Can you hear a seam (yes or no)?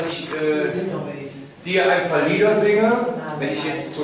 no